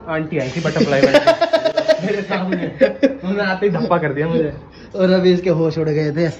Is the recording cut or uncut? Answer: uncut